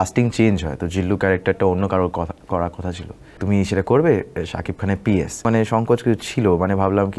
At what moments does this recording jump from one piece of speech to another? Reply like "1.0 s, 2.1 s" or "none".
3.3 s, 5.4 s